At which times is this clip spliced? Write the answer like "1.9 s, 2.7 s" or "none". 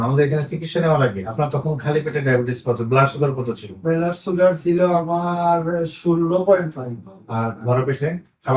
none